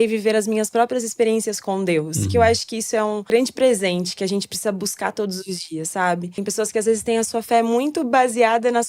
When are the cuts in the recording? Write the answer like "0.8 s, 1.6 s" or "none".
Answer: 3.3 s, 6.3 s